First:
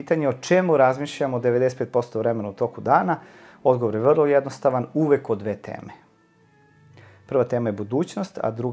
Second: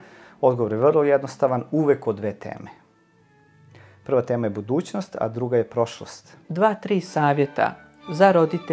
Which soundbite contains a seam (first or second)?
second